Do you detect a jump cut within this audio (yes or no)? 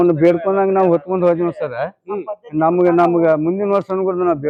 no